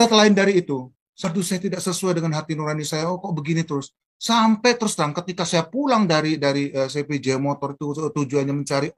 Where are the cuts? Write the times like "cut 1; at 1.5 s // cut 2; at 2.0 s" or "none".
cut 1; at 1.2 s